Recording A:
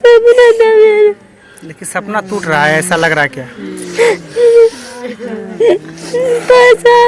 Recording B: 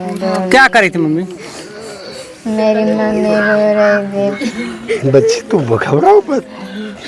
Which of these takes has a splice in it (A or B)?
B